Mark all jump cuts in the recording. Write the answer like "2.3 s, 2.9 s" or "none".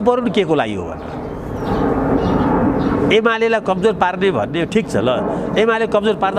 none

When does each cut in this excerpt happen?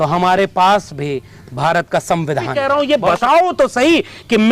2.6 s

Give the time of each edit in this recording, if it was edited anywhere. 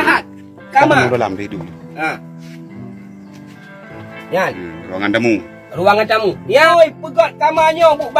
6.7 s

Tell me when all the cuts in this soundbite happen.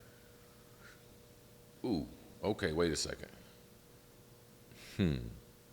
4.7 s

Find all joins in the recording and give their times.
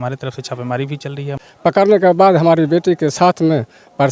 1.4 s

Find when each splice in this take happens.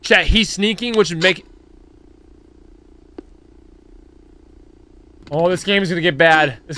5.2 s

